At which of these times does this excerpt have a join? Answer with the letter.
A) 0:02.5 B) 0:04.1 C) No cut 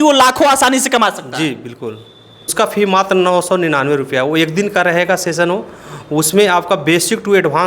A